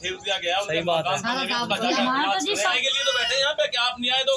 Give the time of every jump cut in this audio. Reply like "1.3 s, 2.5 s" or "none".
2.7 s